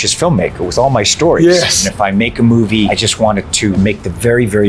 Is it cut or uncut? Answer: cut